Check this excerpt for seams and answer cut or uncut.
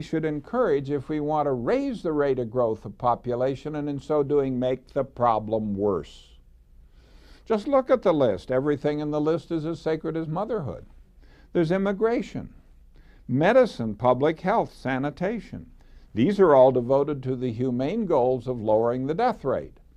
cut